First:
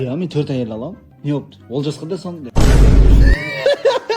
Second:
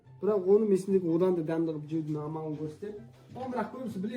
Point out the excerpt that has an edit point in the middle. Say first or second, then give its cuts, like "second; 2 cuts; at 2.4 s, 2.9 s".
first; 2 cuts; at 1.1 s, 2.4 s